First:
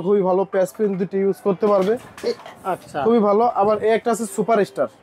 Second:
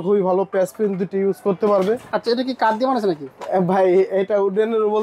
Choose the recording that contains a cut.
second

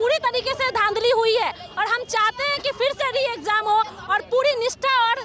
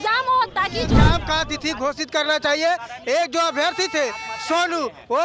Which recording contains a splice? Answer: second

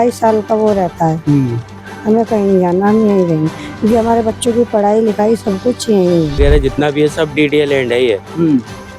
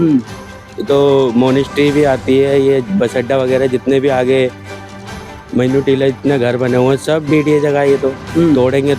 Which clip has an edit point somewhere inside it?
first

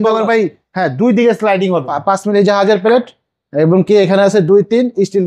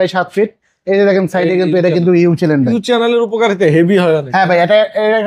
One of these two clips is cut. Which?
first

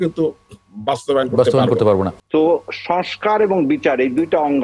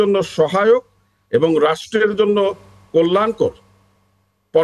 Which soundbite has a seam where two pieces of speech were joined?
first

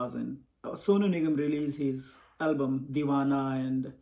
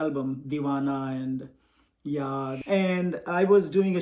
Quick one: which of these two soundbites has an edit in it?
second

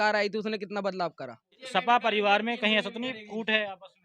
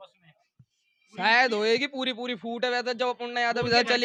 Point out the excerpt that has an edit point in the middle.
first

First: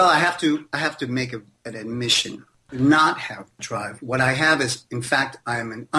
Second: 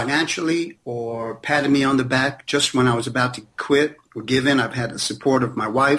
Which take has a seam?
first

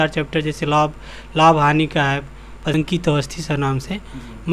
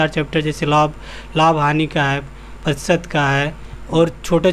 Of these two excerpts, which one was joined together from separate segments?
first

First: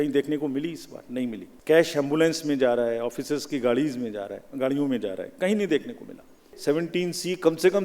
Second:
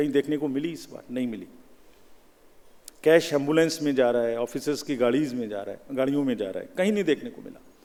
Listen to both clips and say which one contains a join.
first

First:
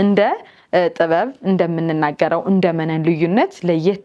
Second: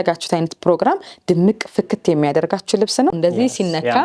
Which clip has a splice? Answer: second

